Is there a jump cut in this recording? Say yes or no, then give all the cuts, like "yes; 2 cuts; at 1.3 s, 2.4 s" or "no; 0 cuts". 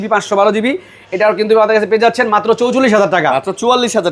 no; 0 cuts